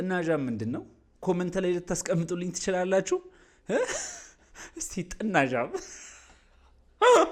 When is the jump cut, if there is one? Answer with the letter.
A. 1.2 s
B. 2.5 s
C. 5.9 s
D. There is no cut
D